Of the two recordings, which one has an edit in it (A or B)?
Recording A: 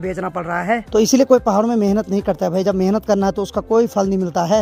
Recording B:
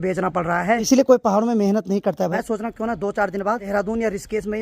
B